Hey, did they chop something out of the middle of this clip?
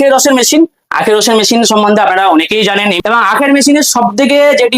yes; 1 cut; at 3.0 s

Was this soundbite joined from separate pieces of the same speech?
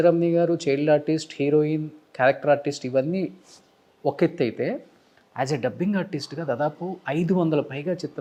no; 0 cuts

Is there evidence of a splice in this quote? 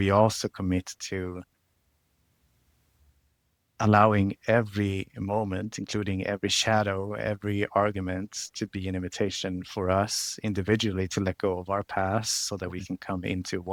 no; 0 cuts

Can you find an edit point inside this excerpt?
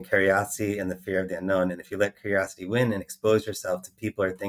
no; 0 cuts

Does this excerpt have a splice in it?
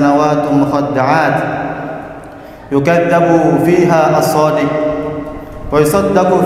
no; 0 cuts

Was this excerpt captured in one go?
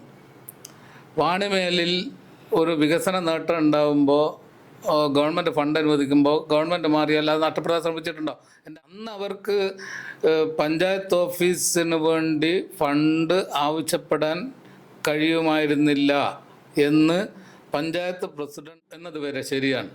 no; 2 cuts; at 8.5 s, 18.7 s

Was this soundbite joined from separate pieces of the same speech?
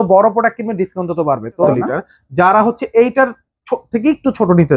yes; 1 cut; at 1.7 s

